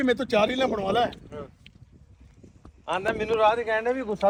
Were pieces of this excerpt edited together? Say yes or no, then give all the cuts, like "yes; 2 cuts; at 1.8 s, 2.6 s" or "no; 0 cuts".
no; 0 cuts